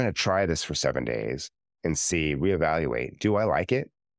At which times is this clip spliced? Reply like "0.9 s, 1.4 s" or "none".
none